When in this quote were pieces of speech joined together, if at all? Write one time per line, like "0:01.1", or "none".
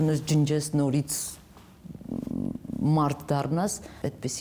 none